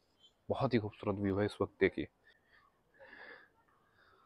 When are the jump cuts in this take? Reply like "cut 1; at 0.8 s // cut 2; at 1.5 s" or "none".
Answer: cut 1; at 2.2 s

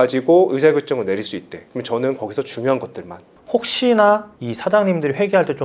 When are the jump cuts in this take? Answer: cut 1; at 3.3 s

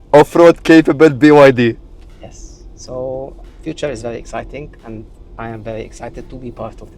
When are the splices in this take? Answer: none

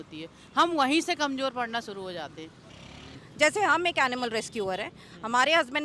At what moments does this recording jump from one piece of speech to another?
none

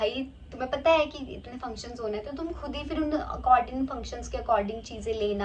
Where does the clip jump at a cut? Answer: none

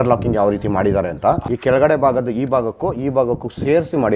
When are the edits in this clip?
cut 1; at 1.5 s

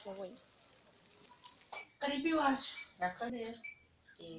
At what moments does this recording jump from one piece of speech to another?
cut 1; at 1.9 s // cut 2; at 3.3 s

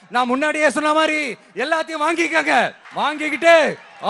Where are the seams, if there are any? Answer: cut 1; at 2.8 s

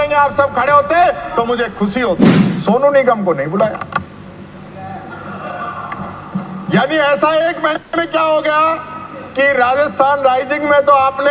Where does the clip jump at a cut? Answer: cut 1; at 2.4 s

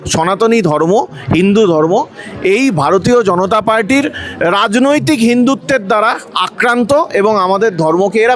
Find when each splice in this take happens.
none

